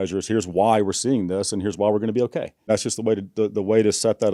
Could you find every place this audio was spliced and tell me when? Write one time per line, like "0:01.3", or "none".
0:02.7